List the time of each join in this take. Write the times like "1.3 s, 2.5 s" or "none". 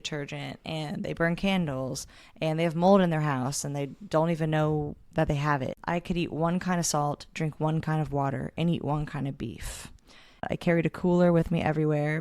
5.8 s, 10.5 s